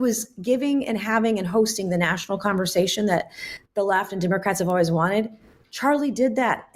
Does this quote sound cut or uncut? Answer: uncut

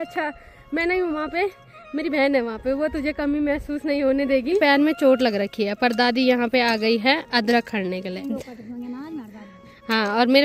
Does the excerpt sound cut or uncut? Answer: cut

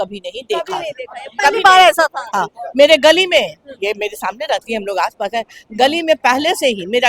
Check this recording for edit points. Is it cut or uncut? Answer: uncut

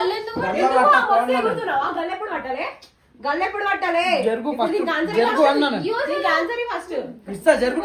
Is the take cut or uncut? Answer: uncut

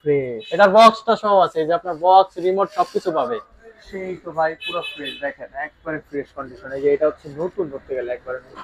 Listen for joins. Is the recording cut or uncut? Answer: uncut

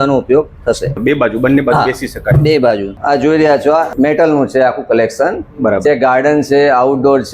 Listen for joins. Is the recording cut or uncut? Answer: cut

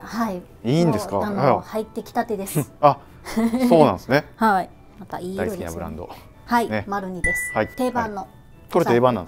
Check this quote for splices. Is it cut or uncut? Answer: uncut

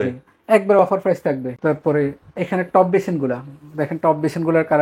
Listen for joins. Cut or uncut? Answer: uncut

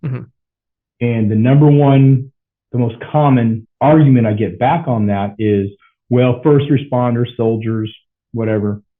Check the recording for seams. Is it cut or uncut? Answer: cut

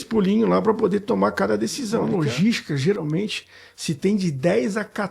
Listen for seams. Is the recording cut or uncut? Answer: cut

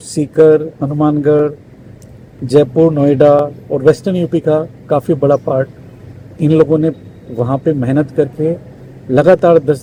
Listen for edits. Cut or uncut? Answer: uncut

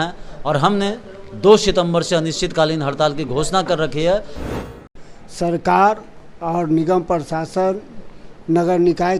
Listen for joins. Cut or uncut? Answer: cut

